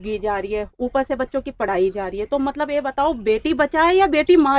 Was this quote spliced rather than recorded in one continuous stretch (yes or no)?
no